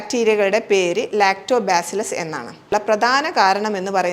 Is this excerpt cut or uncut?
cut